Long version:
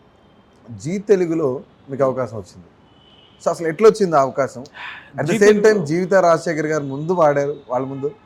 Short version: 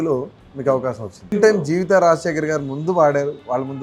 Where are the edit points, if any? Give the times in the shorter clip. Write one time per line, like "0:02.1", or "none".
0:01.3